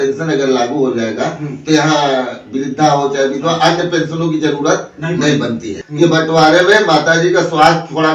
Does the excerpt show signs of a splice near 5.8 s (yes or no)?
yes